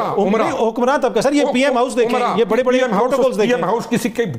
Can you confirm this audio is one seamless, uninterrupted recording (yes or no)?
yes